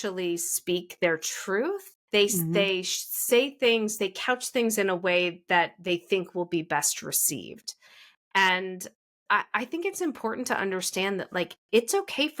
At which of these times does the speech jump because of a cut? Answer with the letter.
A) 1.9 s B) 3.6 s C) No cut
A